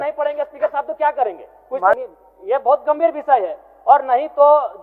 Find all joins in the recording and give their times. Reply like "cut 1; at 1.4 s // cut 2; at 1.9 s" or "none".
cut 1; at 2.0 s